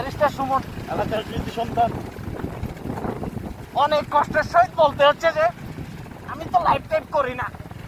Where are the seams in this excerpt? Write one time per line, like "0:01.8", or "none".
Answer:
none